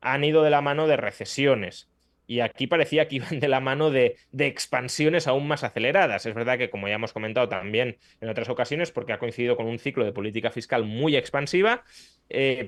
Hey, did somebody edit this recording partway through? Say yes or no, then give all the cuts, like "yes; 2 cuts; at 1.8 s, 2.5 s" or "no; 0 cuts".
no; 0 cuts